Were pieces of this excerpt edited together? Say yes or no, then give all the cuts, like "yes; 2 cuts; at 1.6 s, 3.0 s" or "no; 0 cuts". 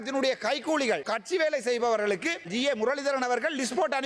yes; 2 cuts; at 1.1 s, 2.5 s